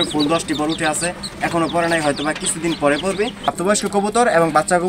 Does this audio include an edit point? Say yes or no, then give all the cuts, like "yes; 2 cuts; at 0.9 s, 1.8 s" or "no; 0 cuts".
yes; 1 cut; at 3.5 s